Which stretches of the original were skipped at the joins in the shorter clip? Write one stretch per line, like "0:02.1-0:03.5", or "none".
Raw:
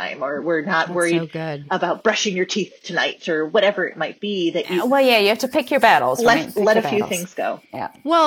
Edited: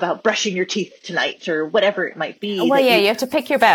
0:04.4-0:04.9